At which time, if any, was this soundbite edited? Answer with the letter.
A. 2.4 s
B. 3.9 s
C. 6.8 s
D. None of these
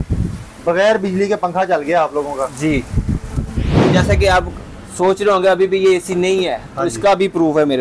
B